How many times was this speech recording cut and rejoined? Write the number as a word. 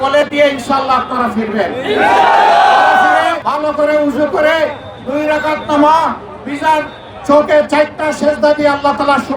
one